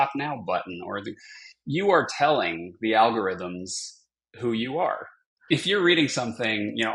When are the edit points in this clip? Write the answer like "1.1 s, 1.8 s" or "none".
5.3 s